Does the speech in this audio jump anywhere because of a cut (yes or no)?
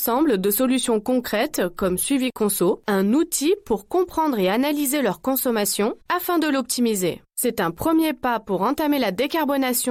no